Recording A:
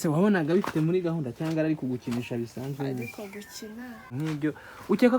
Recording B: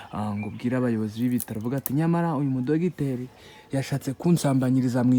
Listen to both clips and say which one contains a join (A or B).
A